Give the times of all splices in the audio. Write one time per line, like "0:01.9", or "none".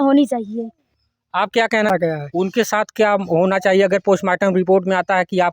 0:01.9